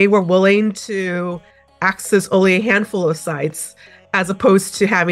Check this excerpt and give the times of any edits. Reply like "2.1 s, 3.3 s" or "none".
none